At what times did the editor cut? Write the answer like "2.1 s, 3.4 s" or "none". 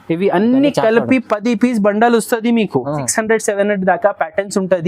3.1 s